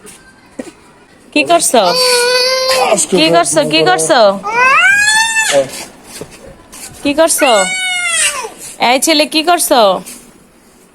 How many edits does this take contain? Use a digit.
1